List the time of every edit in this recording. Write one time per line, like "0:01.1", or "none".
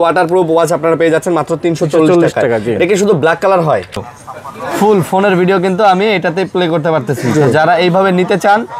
0:04.0